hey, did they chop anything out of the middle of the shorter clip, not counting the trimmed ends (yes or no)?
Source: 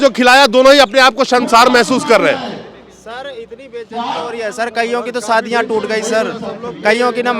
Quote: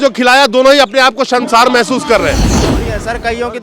yes